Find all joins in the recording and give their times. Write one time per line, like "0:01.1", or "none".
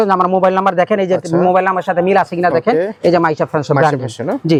none